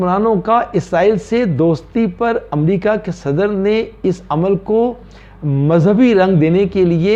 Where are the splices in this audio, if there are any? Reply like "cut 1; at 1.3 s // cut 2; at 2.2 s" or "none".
none